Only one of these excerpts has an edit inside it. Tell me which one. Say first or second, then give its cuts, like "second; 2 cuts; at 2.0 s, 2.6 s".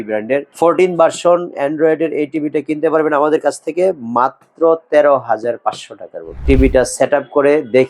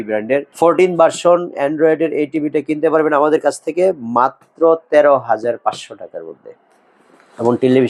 first; 1 cut; at 6.4 s